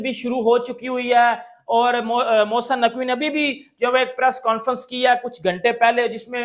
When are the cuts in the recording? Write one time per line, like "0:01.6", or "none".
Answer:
none